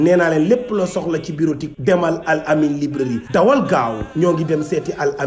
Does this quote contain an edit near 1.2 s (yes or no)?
no